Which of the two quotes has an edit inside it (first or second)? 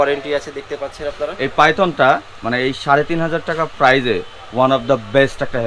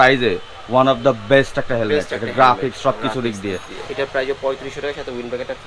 second